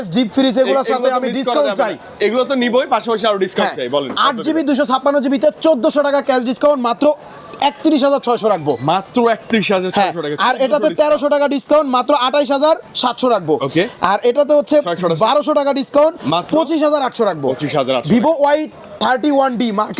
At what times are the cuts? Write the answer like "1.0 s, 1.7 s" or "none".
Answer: none